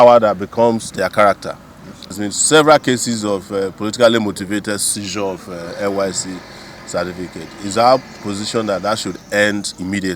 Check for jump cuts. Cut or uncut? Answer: cut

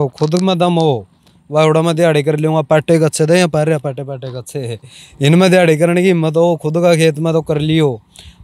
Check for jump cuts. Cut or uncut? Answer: uncut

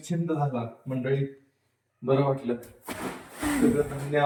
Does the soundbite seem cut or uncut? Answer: uncut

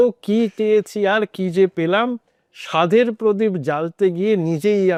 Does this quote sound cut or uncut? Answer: uncut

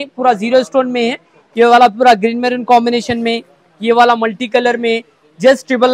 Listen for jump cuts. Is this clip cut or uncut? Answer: uncut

